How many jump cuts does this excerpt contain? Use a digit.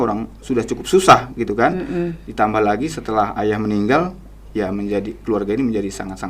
0